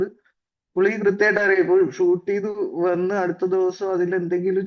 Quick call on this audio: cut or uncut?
uncut